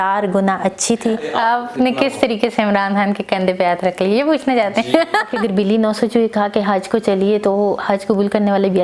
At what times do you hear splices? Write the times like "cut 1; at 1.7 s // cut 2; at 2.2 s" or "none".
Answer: cut 1; at 1.2 s // cut 2; at 5.3 s